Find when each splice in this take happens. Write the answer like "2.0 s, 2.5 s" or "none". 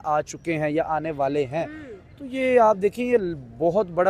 none